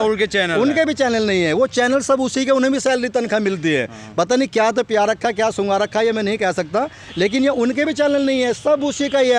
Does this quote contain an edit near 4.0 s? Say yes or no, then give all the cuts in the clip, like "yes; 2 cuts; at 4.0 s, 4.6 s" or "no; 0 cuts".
no; 0 cuts